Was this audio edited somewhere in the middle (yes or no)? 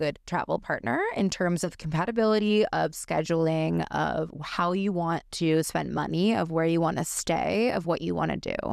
no